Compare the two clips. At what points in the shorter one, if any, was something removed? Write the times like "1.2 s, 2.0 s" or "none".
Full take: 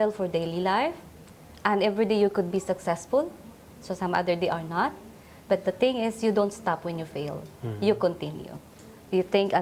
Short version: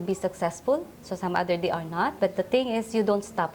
1.0 s, 2.1 s